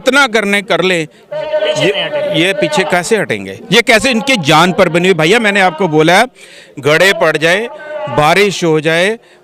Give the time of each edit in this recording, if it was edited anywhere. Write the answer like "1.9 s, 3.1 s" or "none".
none